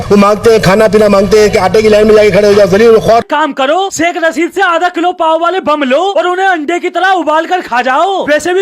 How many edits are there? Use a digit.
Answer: 1